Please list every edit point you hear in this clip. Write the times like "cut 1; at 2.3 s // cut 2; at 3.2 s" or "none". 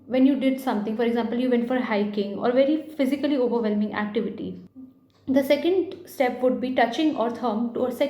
cut 1; at 4.6 s